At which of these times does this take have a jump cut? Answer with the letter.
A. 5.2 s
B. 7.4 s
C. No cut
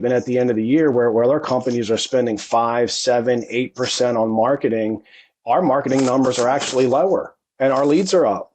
B